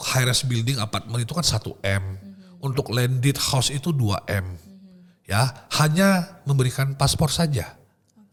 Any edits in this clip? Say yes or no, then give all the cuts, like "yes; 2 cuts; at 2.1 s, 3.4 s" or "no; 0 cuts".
no; 0 cuts